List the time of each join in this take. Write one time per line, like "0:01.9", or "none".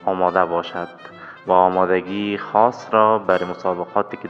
none